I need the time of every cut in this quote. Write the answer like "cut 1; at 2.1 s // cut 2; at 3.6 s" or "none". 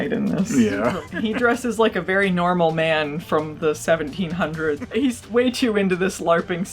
cut 1; at 1.0 s // cut 2; at 4.8 s

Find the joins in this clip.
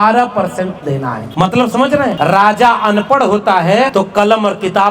cut 1; at 1.2 s // cut 2; at 2.1 s // cut 3; at 3.9 s

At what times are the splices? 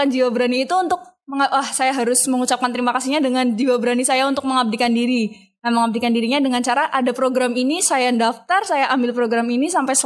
none

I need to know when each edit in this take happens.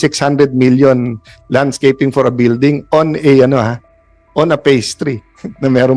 none

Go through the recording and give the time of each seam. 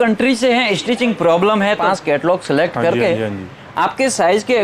cut 1; at 1.8 s

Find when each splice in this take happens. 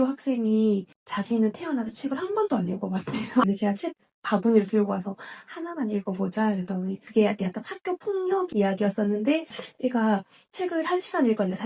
cut 1; at 1.0 s // cut 2; at 3.4 s // cut 3; at 7.0 s // cut 4; at 9.6 s

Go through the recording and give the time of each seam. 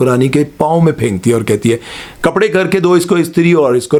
none

